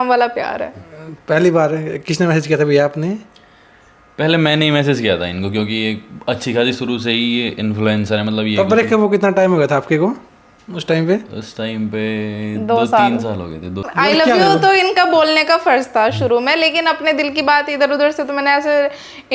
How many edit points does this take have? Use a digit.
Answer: 1